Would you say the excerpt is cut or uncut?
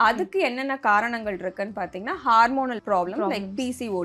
cut